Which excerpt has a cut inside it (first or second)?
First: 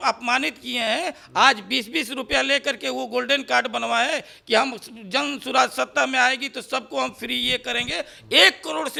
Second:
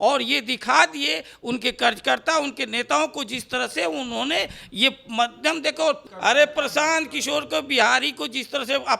second